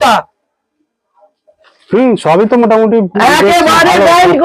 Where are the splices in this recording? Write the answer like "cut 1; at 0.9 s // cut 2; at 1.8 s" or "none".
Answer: none